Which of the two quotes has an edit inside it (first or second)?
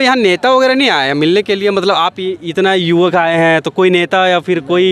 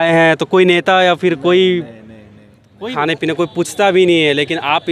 second